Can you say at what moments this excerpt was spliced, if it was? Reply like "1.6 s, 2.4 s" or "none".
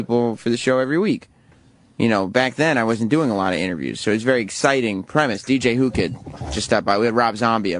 4.2 s

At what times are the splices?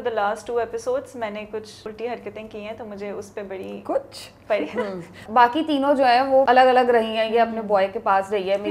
1.8 s, 5.2 s, 6.5 s

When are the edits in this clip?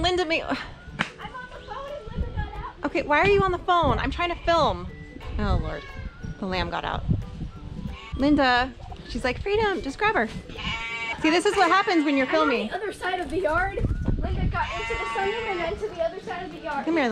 none

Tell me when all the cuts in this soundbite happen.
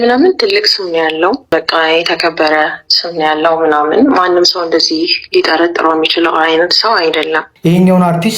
1.5 s, 7.5 s

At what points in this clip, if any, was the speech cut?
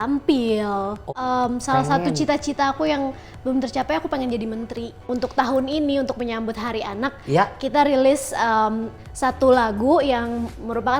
1.1 s, 5.1 s

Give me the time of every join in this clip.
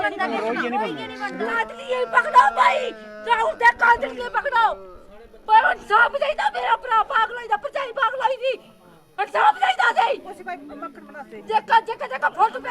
1.5 s

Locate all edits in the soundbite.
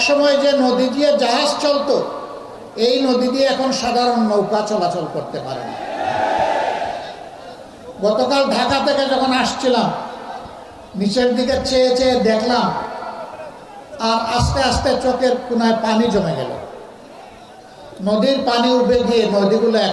none

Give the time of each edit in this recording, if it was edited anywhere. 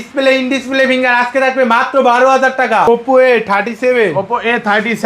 2.9 s

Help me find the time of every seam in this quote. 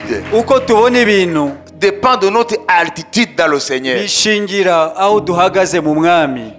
none

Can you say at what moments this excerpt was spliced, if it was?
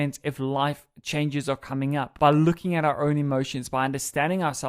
2.1 s

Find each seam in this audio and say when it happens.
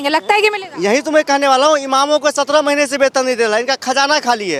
none

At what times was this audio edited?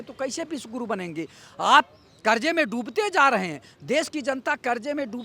none

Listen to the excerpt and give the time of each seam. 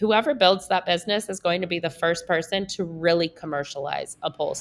none

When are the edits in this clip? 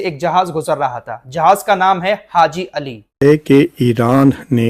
3.1 s

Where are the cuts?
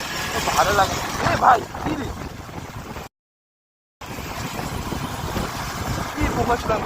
2.7 s

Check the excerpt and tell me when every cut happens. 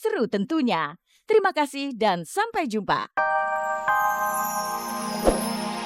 3.1 s

